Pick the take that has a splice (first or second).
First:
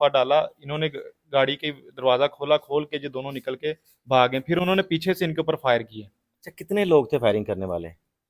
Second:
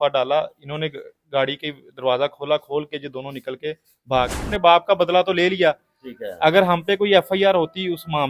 second